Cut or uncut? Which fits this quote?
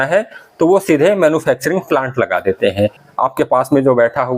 cut